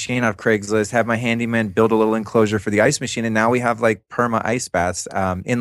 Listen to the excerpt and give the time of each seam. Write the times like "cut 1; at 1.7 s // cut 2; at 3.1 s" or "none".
none